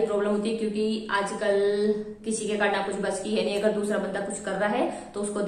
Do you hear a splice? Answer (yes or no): no